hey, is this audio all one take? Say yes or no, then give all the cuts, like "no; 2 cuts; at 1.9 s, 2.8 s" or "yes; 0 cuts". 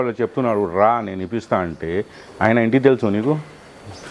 yes; 0 cuts